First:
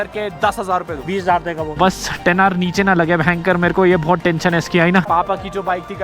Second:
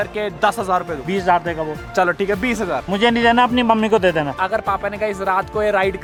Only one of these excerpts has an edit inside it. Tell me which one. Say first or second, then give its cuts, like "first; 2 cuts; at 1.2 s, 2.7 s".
first; 2 cuts; at 1.8 s, 5.1 s